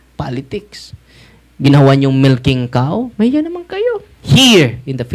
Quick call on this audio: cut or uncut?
cut